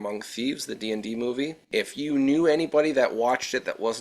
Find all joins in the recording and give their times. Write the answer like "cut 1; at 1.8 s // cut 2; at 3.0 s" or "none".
cut 1; at 1.7 s